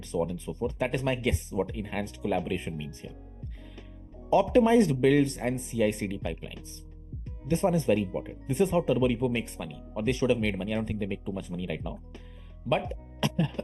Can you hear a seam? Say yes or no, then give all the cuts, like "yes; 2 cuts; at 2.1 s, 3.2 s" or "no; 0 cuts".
no; 0 cuts